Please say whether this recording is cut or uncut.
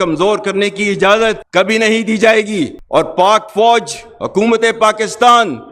uncut